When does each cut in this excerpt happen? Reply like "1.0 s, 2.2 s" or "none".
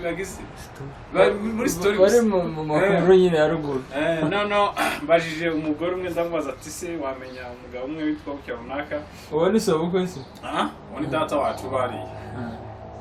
none